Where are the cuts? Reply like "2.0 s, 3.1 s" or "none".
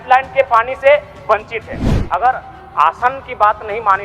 1.9 s